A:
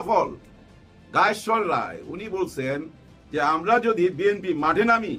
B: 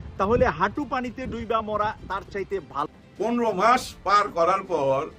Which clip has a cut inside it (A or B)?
B